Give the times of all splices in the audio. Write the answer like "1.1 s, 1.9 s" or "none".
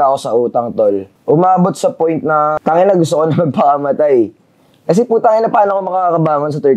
1.1 s, 2.6 s

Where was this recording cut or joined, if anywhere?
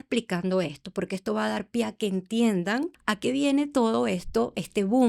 3.0 s

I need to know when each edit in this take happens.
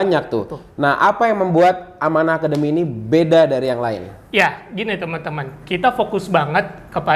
none

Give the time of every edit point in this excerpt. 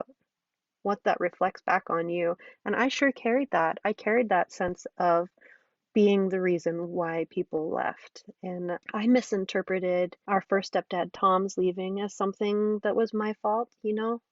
8.8 s, 10.2 s

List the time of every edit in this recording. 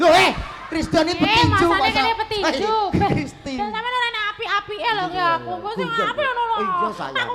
none

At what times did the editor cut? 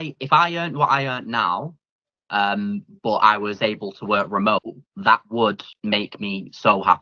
none

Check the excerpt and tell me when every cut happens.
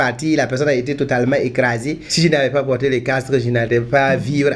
2.0 s

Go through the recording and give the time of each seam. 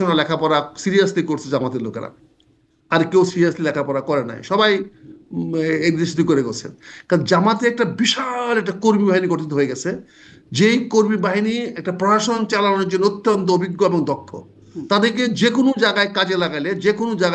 none

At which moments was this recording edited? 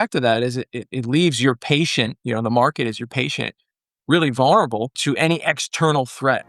5.0 s

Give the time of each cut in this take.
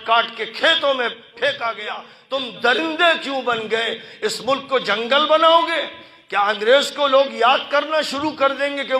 2.1 s

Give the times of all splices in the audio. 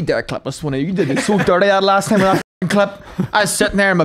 none

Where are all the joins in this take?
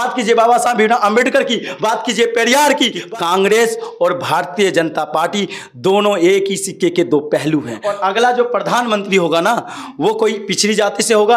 3.0 s, 7.8 s

